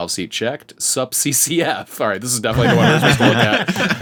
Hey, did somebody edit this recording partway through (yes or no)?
no